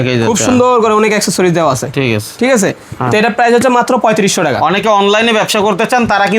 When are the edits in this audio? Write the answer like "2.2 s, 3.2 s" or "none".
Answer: none